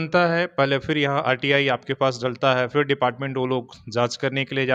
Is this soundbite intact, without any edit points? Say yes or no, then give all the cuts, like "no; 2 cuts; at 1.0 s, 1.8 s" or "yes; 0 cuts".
yes; 0 cuts